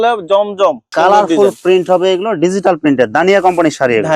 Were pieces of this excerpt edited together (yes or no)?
yes